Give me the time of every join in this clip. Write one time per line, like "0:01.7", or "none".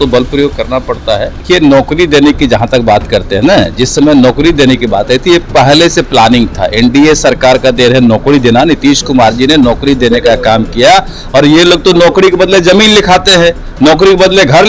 0:01.4